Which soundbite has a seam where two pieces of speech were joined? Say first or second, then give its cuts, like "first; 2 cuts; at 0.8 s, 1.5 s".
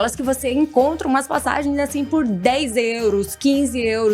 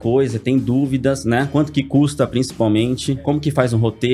second; 2 cuts; at 1.5 s, 3.2 s